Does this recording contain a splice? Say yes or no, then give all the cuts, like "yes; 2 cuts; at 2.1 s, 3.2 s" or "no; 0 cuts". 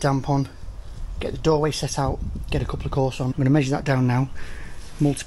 yes; 1 cut; at 3.3 s